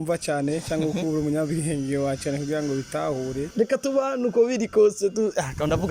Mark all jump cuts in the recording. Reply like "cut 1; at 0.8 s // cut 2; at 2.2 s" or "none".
cut 1; at 3.5 s